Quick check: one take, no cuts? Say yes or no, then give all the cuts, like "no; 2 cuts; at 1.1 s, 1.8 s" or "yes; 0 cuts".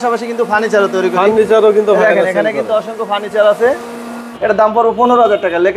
no; 1 cut; at 4.2 s